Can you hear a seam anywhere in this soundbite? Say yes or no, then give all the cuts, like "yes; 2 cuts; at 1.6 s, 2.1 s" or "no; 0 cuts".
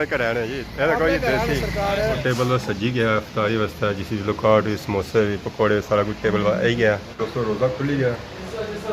yes; 2 cuts; at 2.2 s, 7.1 s